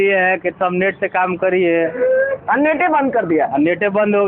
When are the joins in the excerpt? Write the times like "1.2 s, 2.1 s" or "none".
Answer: none